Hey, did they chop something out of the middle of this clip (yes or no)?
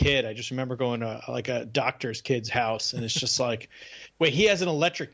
no